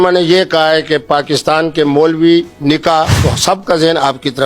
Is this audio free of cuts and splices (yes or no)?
no